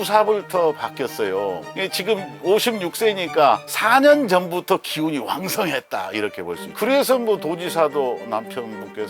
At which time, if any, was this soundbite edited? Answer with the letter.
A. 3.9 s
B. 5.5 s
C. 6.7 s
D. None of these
C